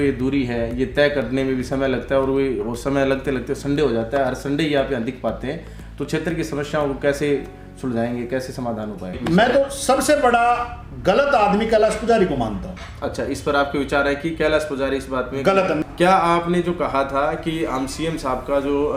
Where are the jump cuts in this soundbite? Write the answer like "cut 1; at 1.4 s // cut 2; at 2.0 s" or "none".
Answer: cut 1; at 9.2 s // cut 2; at 15.8 s

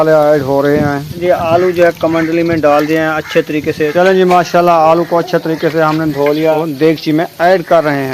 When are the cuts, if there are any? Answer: cut 1; at 1.2 s // cut 2; at 3.9 s // cut 3; at 6.6 s

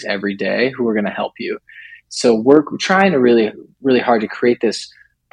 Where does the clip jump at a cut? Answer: cut 1; at 2.0 s

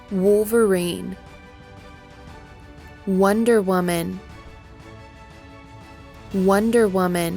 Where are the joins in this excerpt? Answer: cut 1; at 1.2 s // cut 2; at 2.7 s

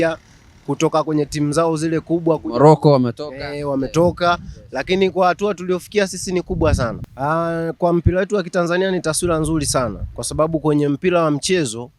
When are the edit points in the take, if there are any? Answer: cut 1; at 7.0 s

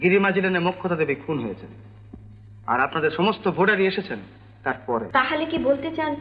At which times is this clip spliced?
cut 1; at 5.1 s

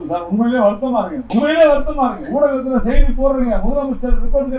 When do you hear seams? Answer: cut 1; at 1.2 s

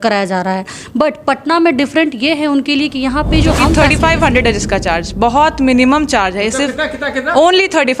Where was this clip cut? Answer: cut 1; at 3.8 s

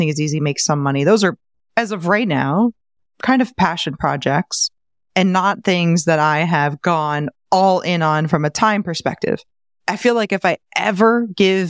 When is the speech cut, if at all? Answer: none

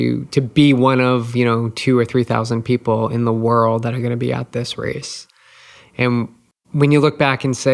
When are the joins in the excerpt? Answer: cut 1; at 6.5 s

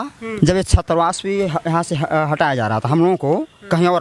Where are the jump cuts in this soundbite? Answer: none

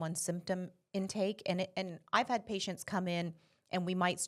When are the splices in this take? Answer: none

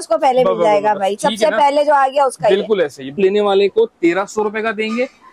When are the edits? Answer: cut 1; at 3.2 s

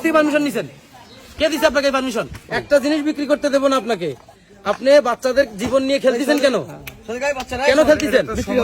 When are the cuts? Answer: cut 1; at 2.5 s

